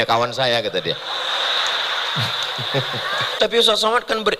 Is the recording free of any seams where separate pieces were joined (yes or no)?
no